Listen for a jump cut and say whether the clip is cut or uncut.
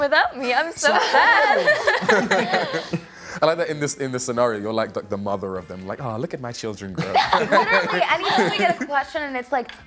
uncut